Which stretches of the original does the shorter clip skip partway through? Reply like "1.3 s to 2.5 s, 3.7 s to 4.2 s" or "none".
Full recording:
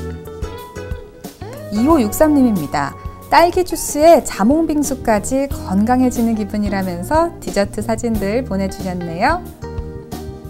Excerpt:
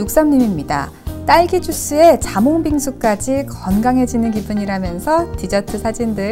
none